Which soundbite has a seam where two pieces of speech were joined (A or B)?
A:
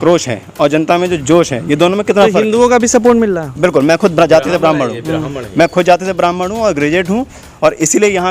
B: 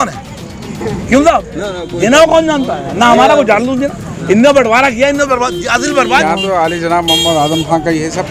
B